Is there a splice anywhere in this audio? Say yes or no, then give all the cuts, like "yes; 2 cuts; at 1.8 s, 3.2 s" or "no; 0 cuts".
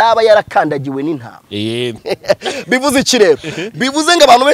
yes; 1 cut; at 2.0 s